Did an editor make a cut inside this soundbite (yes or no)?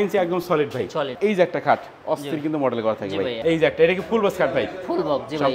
yes